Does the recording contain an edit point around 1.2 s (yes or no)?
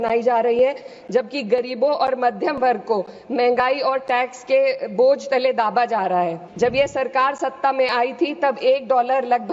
no